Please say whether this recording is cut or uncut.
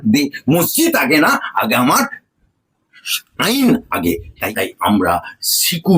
cut